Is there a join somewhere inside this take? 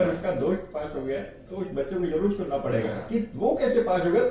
no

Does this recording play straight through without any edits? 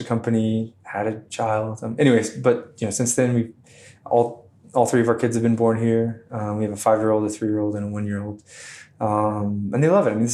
yes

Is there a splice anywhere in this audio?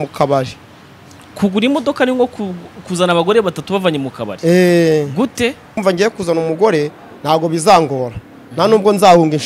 yes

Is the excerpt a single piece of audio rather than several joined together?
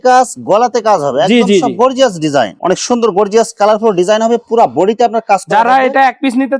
no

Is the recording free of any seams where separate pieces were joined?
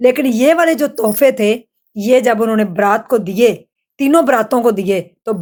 yes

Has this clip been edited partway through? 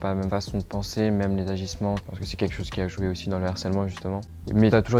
no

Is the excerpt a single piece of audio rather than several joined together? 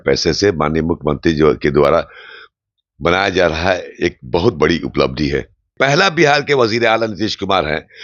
no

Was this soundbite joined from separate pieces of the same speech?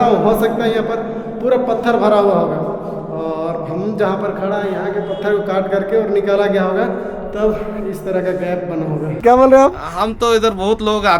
yes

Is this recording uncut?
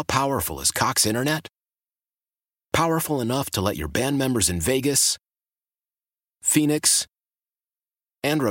yes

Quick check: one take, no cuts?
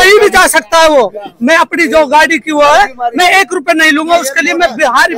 yes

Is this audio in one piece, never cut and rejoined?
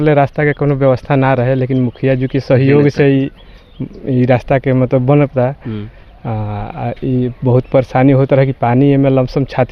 yes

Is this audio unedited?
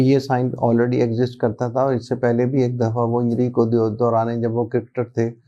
yes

